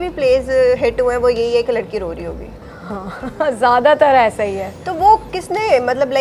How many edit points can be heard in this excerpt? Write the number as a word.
zero